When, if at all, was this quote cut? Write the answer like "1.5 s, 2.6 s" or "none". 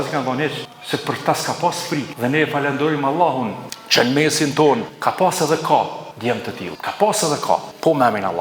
none

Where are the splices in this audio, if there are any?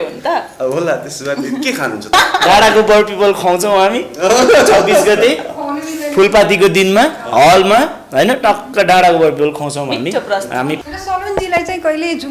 2.1 s, 10.8 s

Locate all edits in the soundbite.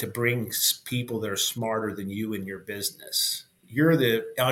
3.6 s

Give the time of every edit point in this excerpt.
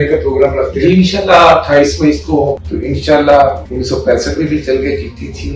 2.7 s, 3.7 s

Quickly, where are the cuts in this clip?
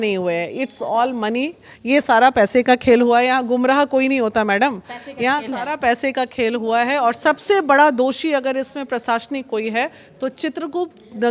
none

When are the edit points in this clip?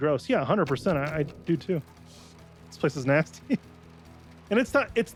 none

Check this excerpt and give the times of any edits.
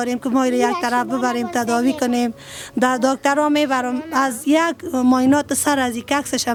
none

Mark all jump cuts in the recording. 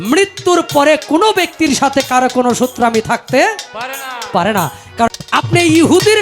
5.1 s

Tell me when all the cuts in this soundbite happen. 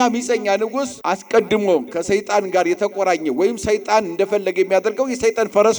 0.9 s

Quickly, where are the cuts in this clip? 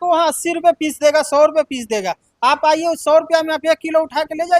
none

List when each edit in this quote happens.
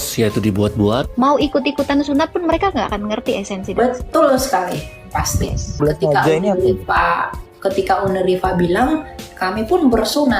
1.1 s, 5.8 s

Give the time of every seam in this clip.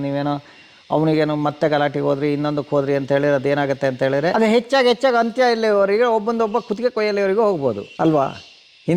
4.3 s, 7.9 s

